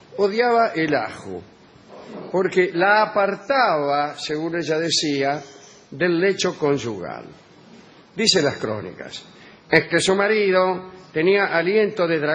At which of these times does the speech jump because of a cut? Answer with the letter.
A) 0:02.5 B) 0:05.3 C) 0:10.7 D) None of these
A